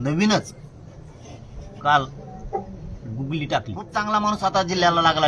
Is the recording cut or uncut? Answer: cut